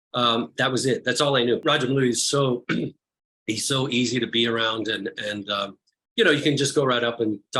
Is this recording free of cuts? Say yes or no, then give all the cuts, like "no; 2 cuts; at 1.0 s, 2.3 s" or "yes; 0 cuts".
no; 1 cut; at 1.6 s